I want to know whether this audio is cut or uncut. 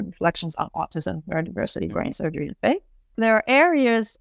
cut